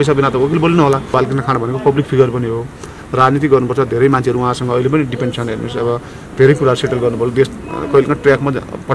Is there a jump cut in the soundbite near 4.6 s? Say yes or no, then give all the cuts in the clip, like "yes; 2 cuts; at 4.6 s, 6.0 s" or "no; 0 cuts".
no; 1 cut; at 1.1 s